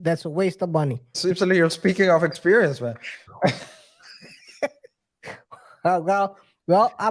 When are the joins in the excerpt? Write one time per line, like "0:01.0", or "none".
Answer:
0:01.1